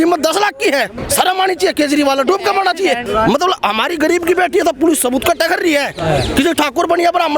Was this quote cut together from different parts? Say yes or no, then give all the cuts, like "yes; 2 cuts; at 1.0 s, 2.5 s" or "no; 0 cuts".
yes; 2 cuts; at 1.0 s, 3.0 s